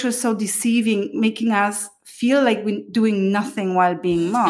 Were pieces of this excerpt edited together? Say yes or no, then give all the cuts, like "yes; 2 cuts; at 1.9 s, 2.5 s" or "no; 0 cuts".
no; 0 cuts